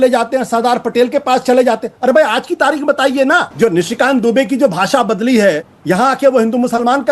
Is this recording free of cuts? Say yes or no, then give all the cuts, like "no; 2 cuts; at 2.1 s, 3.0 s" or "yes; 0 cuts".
no; 2 cuts; at 3.5 s, 5.7 s